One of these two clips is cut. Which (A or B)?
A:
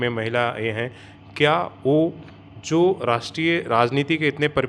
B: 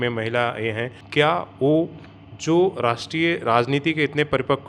B